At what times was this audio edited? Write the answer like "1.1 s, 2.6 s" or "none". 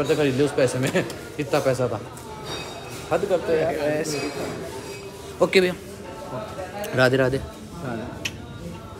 none